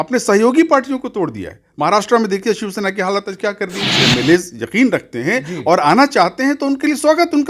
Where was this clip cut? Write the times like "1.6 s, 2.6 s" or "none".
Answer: 3.8 s